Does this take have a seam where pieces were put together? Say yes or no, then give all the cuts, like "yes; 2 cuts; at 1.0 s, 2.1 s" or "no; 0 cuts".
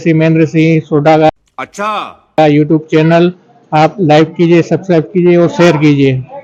no; 0 cuts